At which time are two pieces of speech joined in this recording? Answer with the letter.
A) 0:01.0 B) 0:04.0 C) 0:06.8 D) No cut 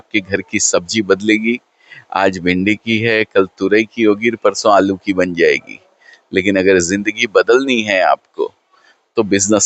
D